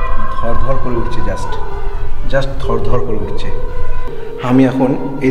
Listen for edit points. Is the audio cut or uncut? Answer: uncut